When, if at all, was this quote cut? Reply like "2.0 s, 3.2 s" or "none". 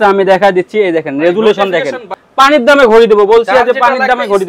2.2 s